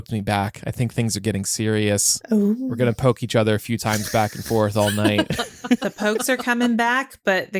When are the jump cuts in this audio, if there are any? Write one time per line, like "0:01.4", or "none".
0:02.1
0:05.9